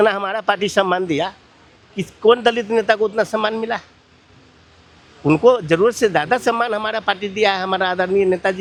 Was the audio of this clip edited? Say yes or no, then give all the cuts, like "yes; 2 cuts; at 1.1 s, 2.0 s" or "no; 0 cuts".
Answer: no; 0 cuts